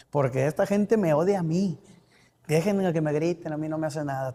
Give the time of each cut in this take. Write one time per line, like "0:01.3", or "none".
none